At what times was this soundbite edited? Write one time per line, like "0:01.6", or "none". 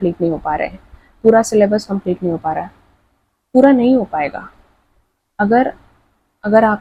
none